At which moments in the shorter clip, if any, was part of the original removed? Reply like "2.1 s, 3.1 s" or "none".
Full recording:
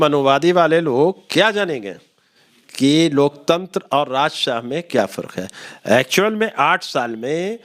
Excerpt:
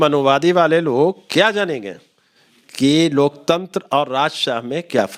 none

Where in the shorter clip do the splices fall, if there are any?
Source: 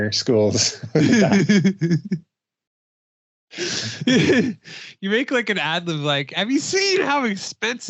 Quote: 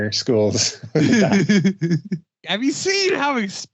2.4 s

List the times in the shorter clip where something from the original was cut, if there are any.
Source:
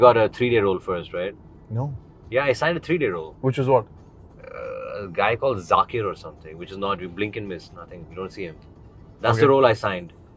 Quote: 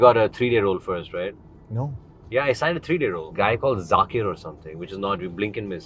3.3 s

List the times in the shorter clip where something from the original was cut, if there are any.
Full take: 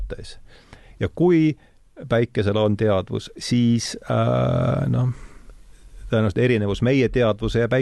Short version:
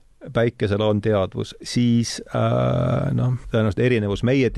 3.4 s

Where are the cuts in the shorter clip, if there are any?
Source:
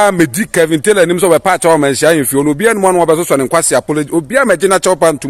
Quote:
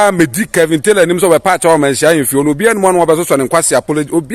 none

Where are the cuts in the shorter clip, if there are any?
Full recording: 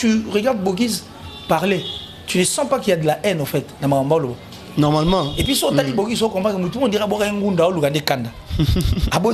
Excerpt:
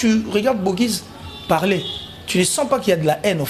none

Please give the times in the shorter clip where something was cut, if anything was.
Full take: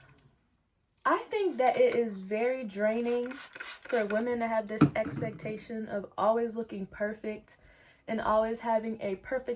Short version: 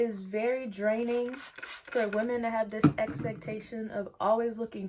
none

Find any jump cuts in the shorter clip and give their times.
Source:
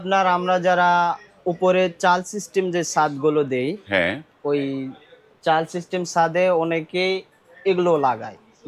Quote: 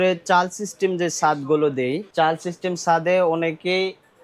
2.1 s

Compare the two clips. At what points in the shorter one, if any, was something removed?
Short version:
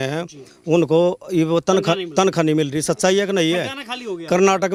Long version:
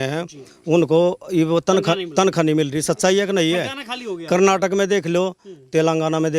none

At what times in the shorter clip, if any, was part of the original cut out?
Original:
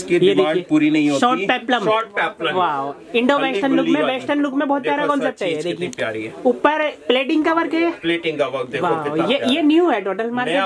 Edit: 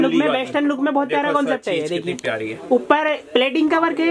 none

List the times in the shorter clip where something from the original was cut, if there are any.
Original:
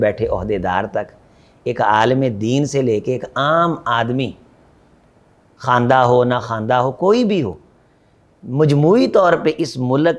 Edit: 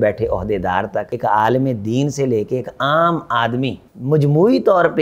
1.1 s, 3.9 s

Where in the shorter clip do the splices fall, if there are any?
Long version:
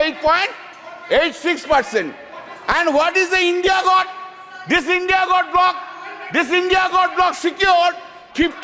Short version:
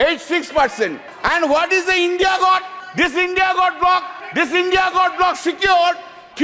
1.1 s, 2.8 s, 4.2 s

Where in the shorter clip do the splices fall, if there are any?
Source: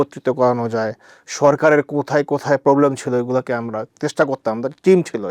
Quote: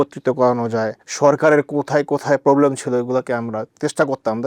1.0 s

